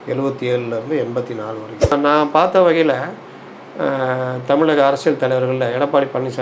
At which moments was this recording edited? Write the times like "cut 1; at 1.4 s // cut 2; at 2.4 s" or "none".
cut 1; at 1.9 s

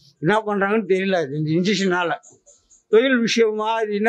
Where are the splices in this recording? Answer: none

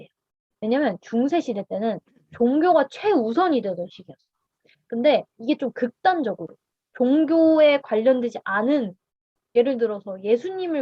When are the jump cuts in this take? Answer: cut 1; at 9.4 s

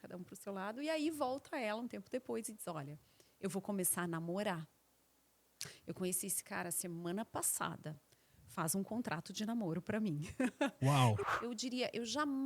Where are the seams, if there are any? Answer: cut 1; at 11.2 s

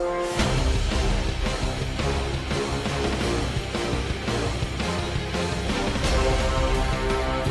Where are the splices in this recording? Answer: none

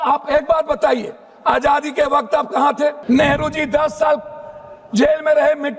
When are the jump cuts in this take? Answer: cut 1; at 3.0 s

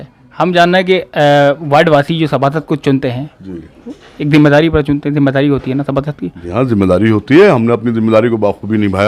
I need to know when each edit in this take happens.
none

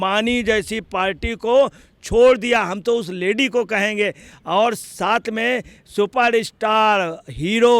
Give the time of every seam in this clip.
none

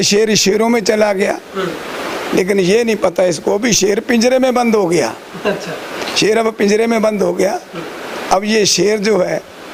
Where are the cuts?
none

